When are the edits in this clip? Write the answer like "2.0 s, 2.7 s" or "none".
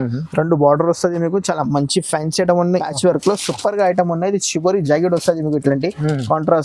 2.9 s

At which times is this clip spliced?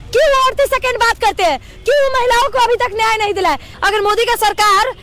3.7 s

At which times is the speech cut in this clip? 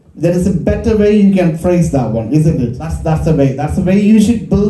2.9 s

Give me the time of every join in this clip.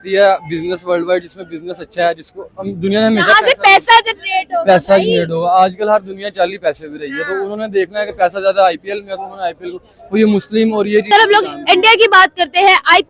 11.1 s

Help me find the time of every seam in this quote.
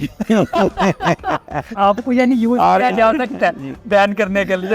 1.7 s

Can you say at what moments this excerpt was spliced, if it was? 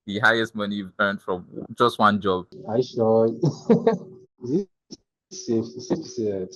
2.5 s, 4.3 s

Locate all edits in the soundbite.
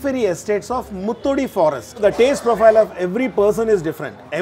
1.9 s

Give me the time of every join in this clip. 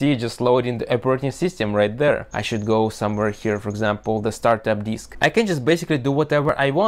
2.4 s, 5.1 s

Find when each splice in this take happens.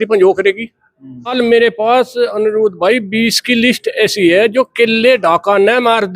1.3 s

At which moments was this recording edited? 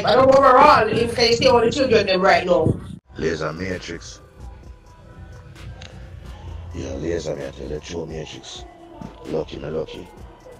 2.9 s

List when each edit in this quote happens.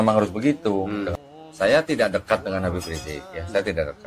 1.1 s

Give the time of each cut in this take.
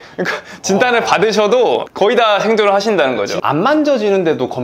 3.3 s

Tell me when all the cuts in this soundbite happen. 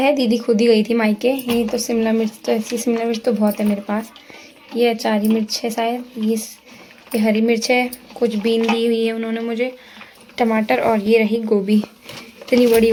none

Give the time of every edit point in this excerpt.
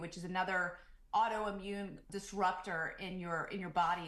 2.1 s

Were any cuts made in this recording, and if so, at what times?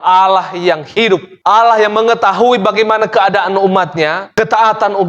1.3 s

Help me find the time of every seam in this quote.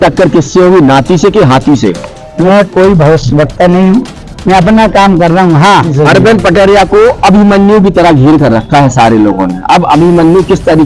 2.5 s, 5.9 s

